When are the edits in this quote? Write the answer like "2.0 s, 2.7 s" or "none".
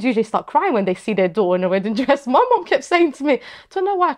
none